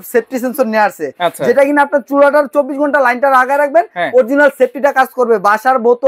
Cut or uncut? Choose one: uncut